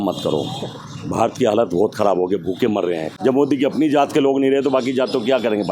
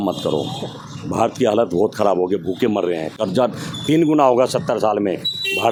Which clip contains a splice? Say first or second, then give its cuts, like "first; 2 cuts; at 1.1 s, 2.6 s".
first; 1 cut; at 3.2 s